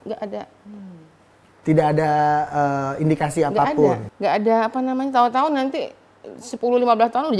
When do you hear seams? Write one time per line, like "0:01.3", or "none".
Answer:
0:04.1